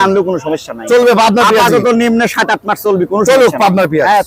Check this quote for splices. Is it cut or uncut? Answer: uncut